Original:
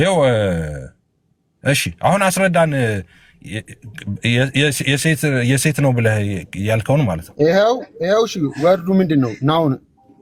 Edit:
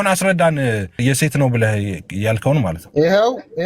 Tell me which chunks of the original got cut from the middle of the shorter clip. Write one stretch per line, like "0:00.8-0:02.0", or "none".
0:03.1-0:05.4